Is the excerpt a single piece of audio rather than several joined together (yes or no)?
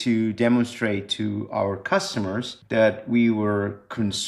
no